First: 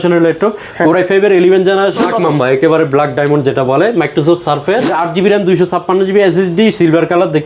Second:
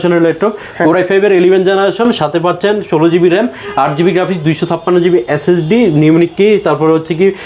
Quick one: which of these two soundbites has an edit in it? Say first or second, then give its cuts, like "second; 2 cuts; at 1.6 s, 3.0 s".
first; 2 cuts; at 2.0 s, 4.9 s